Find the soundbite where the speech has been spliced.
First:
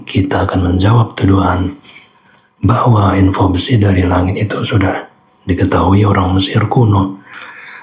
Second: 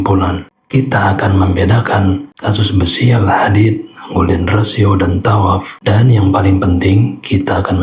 second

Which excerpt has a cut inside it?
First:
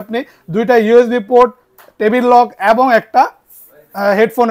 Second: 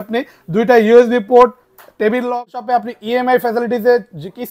second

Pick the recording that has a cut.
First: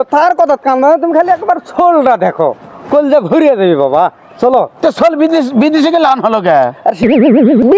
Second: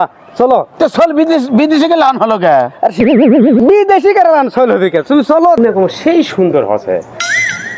second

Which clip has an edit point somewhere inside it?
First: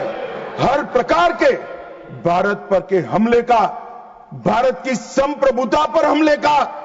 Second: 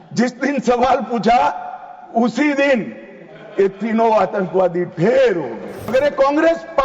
second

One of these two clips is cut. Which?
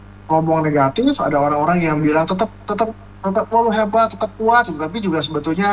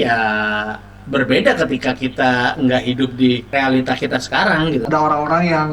second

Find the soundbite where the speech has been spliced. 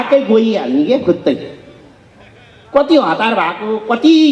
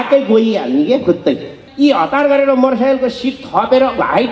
second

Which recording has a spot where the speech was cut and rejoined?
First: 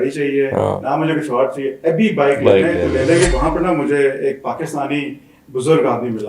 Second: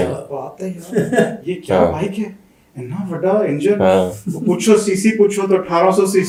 first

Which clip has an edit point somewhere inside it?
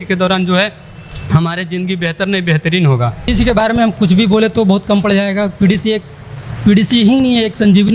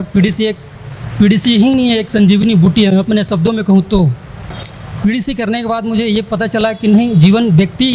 first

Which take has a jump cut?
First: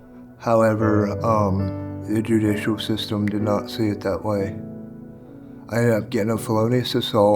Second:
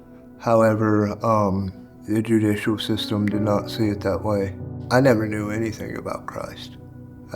second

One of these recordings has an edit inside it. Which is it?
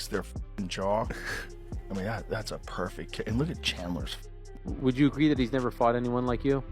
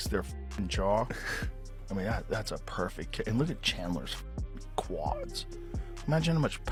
first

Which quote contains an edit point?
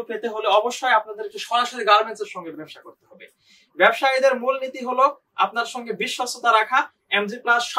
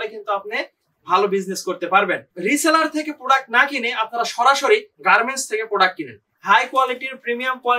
second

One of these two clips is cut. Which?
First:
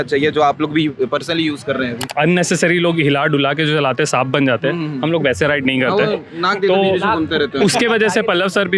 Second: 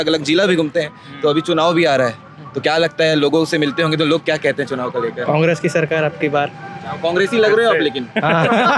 first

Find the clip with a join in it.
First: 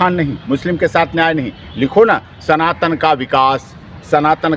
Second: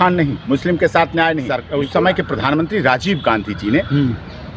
second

